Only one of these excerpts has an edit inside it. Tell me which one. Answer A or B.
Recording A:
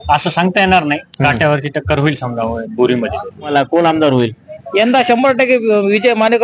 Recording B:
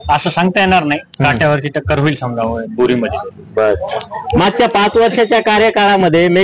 A